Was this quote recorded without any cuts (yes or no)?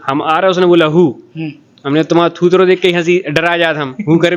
yes